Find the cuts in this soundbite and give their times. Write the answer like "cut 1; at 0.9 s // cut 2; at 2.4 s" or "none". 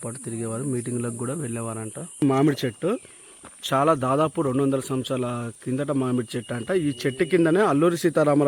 cut 1; at 2.2 s

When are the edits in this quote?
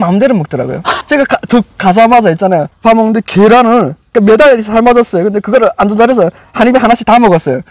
cut 1; at 1.0 s // cut 2; at 2.7 s

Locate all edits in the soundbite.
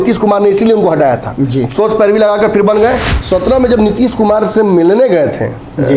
cut 1; at 3.1 s

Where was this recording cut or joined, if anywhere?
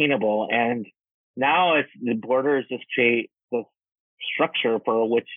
cut 1; at 3.4 s

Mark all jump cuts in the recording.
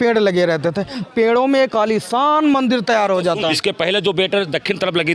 cut 1; at 1.0 s // cut 2; at 3.5 s

